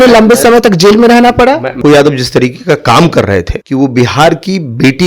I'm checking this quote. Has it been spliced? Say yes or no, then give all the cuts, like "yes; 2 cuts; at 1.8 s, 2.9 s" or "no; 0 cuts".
yes; 2 cuts; at 1.8 s, 3.6 s